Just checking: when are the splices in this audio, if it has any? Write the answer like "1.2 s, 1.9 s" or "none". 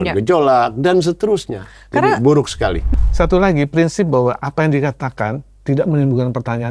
2.8 s